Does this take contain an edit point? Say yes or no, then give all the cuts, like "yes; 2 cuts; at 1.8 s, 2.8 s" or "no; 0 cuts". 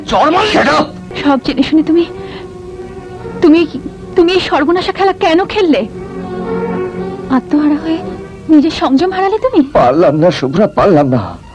yes; 1 cut; at 1.0 s